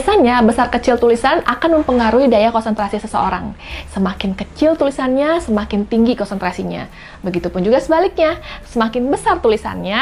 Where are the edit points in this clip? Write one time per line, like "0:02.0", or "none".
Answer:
none